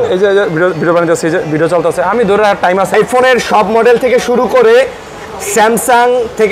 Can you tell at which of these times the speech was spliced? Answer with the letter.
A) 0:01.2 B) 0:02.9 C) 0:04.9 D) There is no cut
B